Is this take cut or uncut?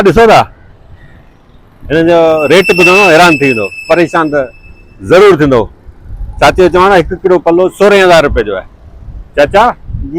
uncut